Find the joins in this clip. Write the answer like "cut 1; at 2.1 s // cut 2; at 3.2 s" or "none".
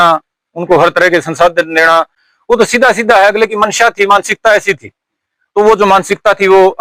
none